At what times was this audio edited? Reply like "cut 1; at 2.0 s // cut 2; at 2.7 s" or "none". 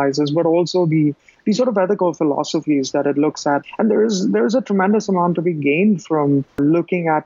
cut 1; at 1.3 s // cut 2; at 3.6 s